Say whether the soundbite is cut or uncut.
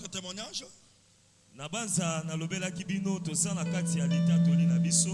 uncut